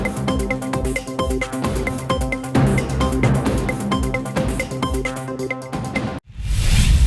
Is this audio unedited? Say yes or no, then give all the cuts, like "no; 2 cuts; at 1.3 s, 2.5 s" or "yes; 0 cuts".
no; 1 cut; at 6.1 s